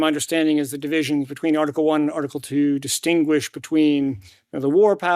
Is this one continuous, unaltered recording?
no; 1 cut; at 3.8 s

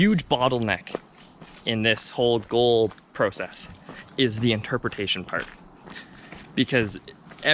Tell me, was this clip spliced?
no; 0 cuts

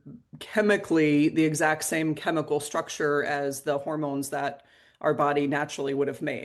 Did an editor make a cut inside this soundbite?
no; 0 cuts

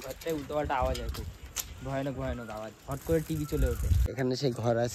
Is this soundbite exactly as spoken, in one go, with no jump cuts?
no; 1 cut; at 3.9 s

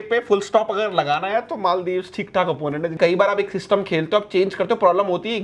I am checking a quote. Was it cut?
yes; 1 cut; at 3.0 s

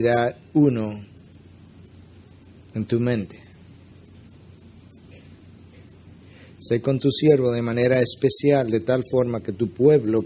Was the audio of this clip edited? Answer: yes; 1 cut; at 6.4 s

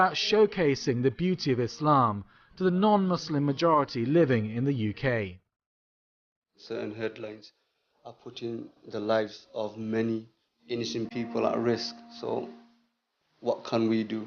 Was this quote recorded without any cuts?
yes; 0 cuts

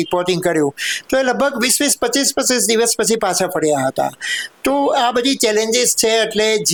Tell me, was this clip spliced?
no; 0 cuts

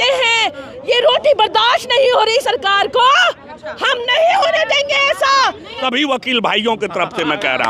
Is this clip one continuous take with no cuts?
no; 1 cut; at 5.8 s

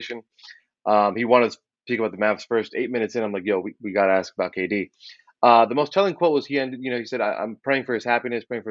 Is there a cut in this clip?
no; 0 cuts

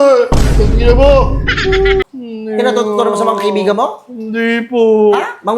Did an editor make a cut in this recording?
yes; 1 cut; at 2.2 s

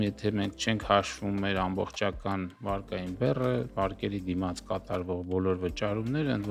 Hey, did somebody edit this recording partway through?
no; 0 cuts

